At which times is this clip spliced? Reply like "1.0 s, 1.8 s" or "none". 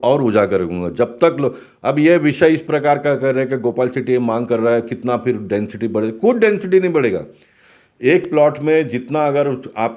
none